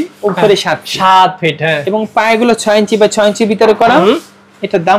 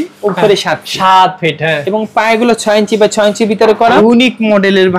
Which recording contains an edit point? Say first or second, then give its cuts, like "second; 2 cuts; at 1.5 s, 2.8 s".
second; 1 cut; at 3.8 s